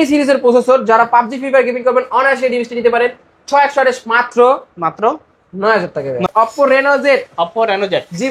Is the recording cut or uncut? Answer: cut